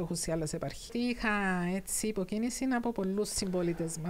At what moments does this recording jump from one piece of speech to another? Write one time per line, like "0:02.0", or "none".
0:00.9